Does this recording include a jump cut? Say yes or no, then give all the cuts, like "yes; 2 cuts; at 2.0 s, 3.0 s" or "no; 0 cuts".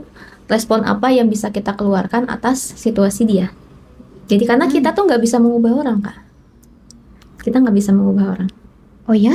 no; 0 cuts